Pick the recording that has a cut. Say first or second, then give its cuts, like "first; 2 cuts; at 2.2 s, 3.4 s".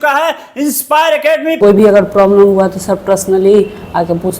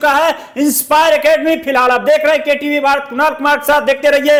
first; 1 cut; at 1.5 s